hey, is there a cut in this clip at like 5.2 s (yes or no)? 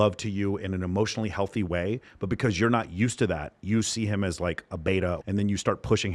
yes